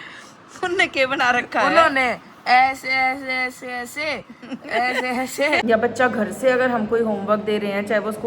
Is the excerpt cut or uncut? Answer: cut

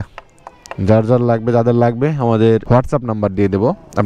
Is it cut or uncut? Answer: cut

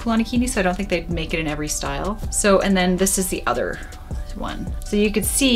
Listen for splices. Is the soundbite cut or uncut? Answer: uncut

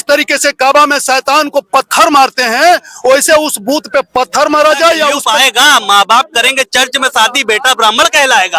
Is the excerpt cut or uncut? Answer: cut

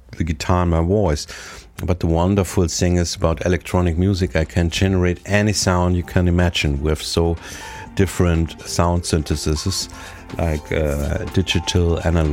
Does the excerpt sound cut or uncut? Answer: cut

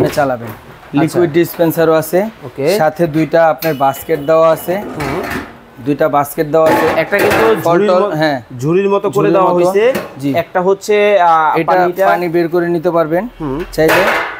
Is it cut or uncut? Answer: uncut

